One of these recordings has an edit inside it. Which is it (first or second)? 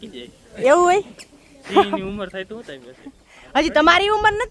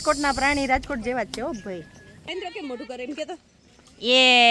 second